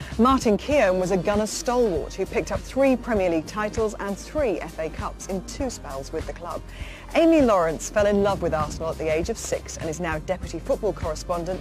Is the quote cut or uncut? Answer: cut